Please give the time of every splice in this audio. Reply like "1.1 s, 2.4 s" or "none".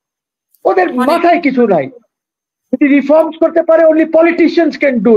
none